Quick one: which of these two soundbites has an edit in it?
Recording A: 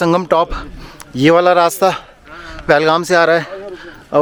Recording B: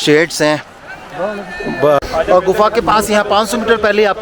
B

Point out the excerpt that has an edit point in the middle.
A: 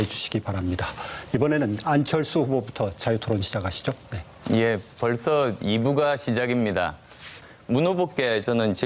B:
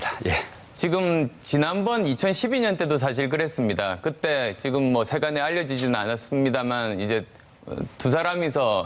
B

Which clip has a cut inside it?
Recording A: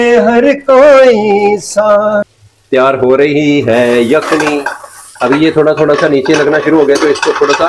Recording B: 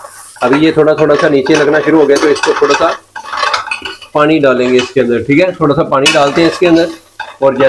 A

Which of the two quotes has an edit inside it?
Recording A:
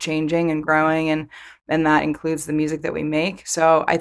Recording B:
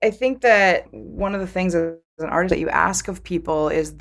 B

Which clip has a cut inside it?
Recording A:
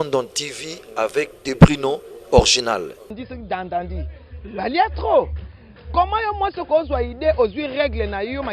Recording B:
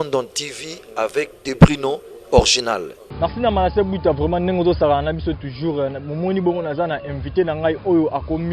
A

